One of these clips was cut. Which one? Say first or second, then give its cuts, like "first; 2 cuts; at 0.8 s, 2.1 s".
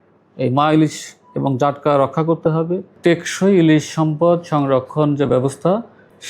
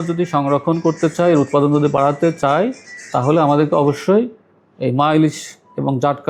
first; 1 cut; at 2.9 s